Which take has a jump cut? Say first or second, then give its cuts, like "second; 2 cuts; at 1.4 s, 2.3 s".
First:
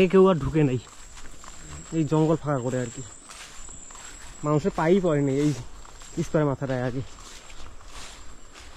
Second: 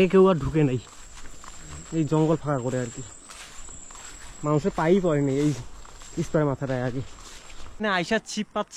second; 1 cut; at 7.8 s